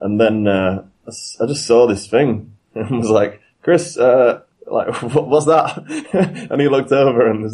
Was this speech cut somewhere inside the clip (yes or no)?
no